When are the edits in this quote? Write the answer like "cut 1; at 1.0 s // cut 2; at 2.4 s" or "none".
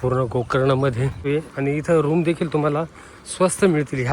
cut 1; at 1.2 s